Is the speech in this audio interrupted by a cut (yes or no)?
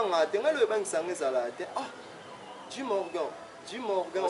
no